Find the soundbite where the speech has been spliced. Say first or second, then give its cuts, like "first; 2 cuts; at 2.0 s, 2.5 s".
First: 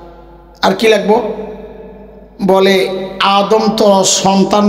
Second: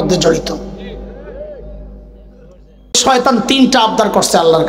second; 1 cut; at 3.0 s